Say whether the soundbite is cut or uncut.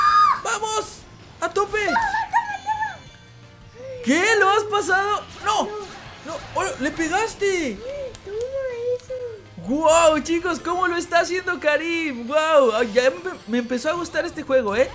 uncut